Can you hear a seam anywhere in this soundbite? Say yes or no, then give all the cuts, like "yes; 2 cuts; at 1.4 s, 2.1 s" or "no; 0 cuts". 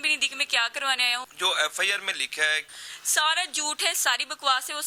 yes; 2 cuts; at 1.3 s, 2.7 s